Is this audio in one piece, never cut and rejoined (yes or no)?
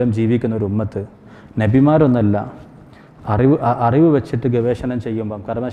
yes